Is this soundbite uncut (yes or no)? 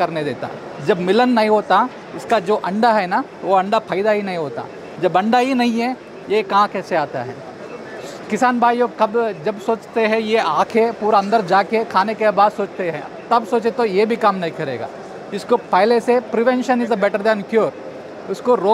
yes